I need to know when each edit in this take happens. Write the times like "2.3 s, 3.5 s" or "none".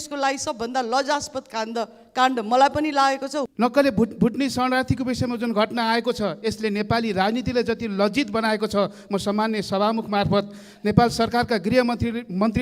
3.4 s